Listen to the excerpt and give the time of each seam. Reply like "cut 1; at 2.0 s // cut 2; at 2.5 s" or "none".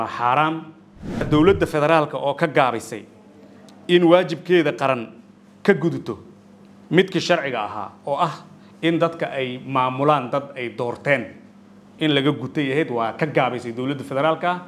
cut 1; at 1.3 s